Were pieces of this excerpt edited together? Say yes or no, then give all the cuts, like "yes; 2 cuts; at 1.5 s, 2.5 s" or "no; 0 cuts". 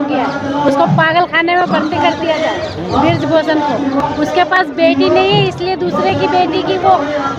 no; 0 cuts